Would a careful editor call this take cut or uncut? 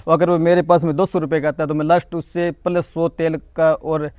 uncut